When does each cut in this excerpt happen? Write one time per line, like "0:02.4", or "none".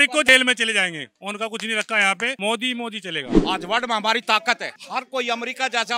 0:02.4
0:03.3
0:04.7